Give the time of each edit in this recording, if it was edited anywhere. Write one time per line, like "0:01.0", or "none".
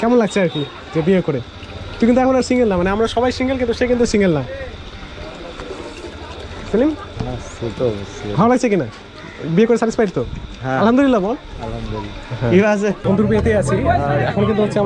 none